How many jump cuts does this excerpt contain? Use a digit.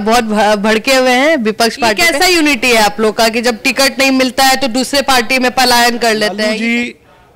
2